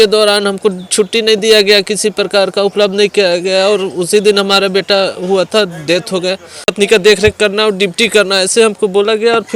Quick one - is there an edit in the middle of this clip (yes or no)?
yes